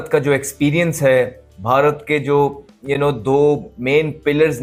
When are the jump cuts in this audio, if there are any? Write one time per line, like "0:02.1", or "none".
none